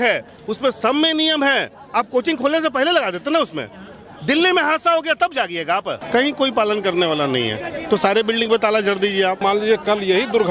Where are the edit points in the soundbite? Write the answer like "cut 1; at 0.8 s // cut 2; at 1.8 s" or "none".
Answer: cut 1; at 6.0 s // cut 2; at 9.4 s